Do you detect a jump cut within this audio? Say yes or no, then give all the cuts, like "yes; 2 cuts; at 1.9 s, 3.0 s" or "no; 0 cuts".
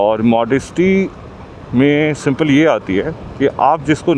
no; 0 cuts